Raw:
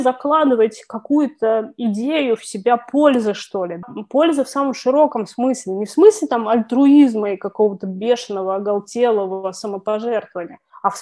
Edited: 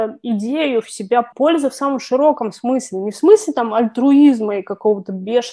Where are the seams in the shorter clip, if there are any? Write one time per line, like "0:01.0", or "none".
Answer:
0:01.3